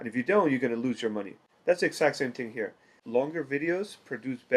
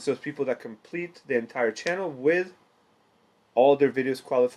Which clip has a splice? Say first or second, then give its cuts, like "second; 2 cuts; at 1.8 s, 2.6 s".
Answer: first; 1 cut; at 3.0 s